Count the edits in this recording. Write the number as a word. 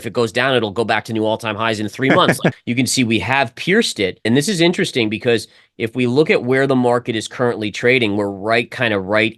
two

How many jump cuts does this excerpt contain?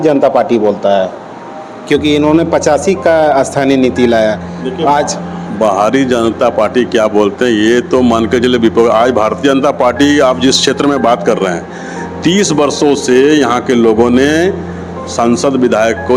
zero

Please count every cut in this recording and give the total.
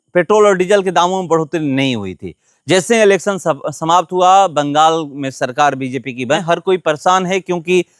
one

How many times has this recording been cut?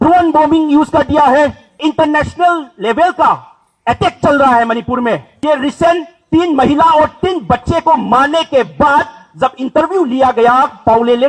two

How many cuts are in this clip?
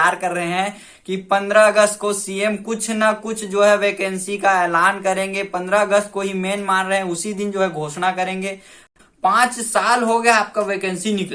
one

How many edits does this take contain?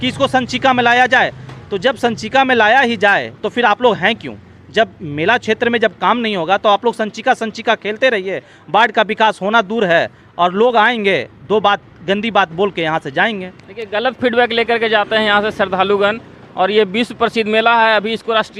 zero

